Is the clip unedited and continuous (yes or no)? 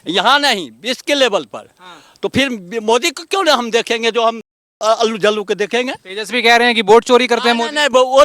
yes